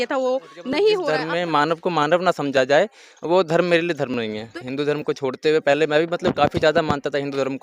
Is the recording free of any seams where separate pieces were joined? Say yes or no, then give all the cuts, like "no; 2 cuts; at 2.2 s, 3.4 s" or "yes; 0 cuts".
no; 2 cuts; at 1.1 s, 4.5 s